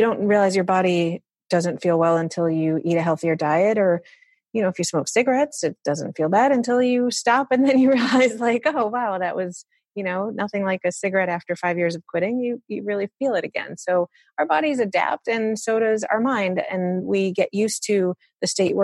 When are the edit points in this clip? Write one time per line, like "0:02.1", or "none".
none

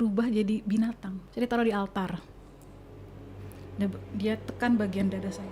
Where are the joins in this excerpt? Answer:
0:01.2

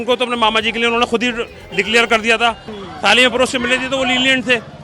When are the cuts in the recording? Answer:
0:02.7

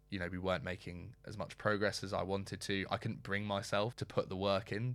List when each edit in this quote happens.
0:04.0

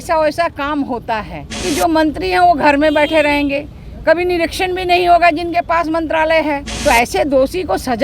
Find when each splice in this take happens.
0:01.6
0:06.7

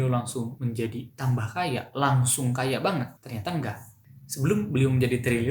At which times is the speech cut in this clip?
0:03.2

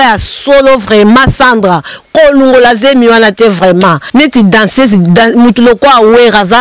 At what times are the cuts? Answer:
0:04.0

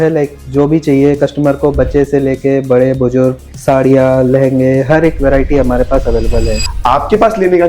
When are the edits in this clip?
0:06.6

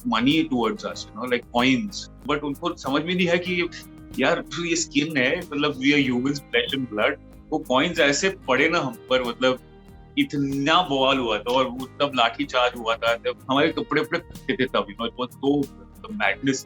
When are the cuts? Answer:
0:02.2
0:13.4

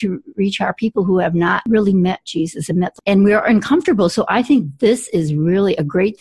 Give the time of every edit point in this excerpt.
0:01.7
0:02.9

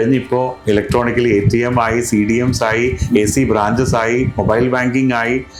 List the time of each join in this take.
none

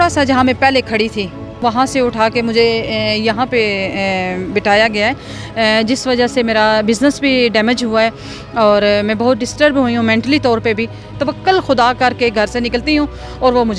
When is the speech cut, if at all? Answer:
0:01.6
0:11.1

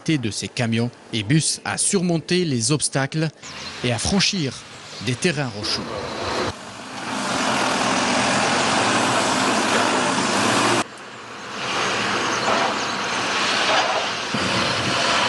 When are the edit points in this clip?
none

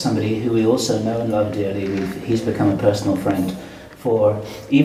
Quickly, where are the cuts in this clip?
none

